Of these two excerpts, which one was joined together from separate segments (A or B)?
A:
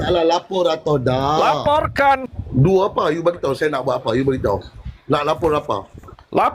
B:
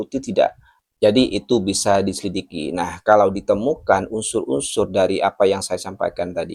A